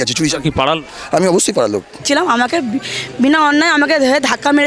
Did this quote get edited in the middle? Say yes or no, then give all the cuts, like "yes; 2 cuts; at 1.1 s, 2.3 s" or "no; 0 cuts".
yes; 1 cut; at 2.0 s